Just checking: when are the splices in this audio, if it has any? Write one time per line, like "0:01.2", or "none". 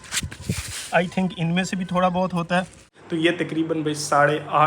0:03.0